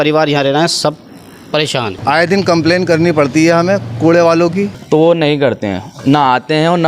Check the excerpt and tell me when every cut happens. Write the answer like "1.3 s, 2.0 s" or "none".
2.0 s, 4.8 s

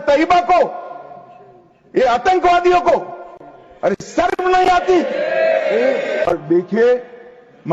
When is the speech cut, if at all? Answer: 6.3 s

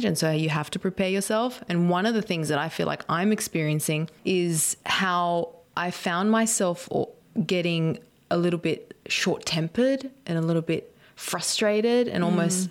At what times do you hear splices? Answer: 4.1 s, 7.2 s

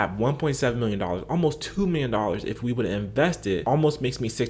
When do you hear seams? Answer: 3.6 s

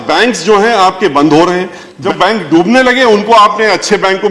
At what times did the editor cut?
2.0 s

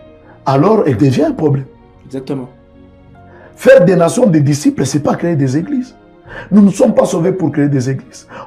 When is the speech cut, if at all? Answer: none

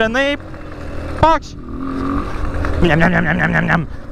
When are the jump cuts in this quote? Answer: none

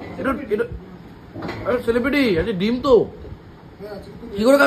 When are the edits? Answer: none

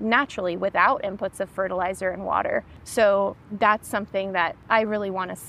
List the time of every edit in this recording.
2.8 s, 3.4 s, 4.6 s

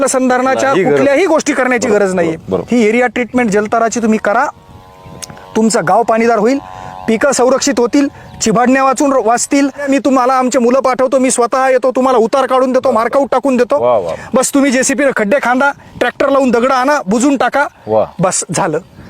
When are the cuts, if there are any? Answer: 9.9 s

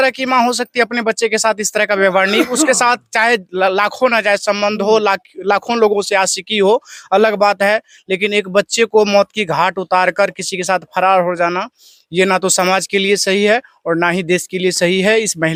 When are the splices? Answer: none

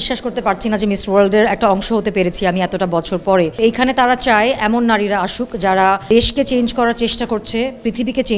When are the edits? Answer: 3.6 s, 6.0 s

